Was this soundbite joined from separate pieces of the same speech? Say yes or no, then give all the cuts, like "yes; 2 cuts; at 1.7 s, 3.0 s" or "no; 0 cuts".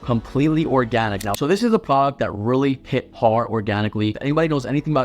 yes; 2 cuts; at 1.3 s, 4.2 s